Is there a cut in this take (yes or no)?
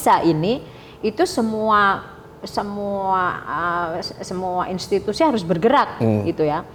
no